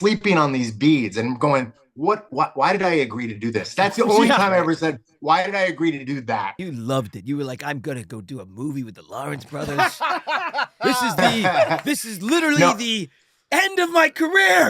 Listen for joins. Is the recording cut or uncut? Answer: cut